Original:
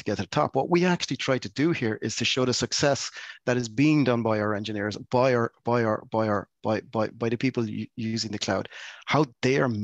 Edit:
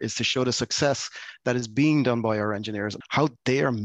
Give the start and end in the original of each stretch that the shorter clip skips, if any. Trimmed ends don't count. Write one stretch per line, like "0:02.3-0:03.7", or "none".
0:05.0-0:08.9